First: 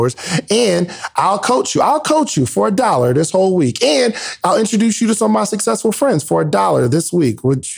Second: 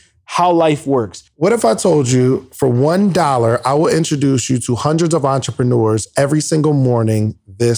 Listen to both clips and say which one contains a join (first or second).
second